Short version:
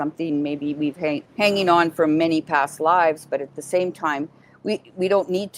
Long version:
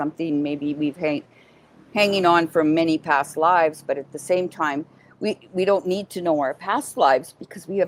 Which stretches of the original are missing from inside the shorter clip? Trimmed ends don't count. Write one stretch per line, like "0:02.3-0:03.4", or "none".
0:01.3-0:01.8